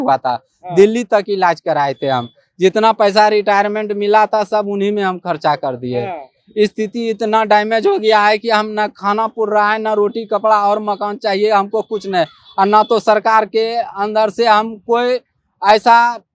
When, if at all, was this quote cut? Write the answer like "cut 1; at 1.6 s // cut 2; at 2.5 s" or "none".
none